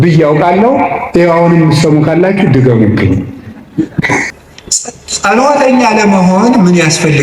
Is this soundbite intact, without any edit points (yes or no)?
no